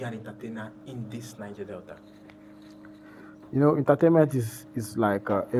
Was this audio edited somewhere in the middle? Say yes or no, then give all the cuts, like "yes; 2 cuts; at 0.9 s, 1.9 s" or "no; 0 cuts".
no; 0 cuts